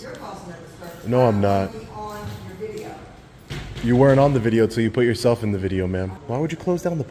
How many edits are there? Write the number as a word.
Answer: one